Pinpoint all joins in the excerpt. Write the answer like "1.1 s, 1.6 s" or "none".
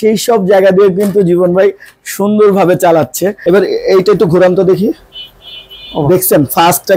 3.4 s